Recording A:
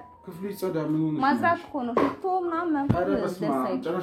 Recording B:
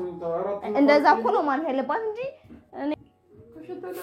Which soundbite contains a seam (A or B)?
B